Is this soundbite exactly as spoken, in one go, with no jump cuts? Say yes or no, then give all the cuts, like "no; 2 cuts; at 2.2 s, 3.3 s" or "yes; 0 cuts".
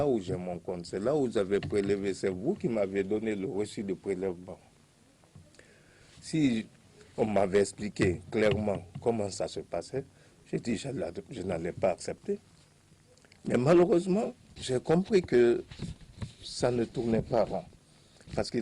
no; 1 cut; at 14.6 s